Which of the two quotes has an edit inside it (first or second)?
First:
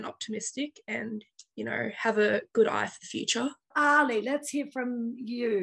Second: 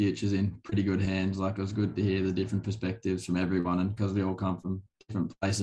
first